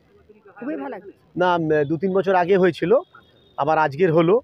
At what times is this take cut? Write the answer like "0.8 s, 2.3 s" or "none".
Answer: 1.1 s